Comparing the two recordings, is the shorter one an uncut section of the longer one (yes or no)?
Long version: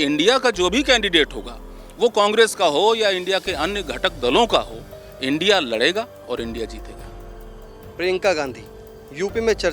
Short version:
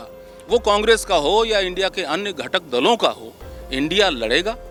yes